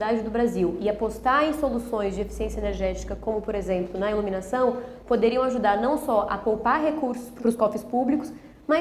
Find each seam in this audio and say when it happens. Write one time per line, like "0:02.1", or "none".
0:07.4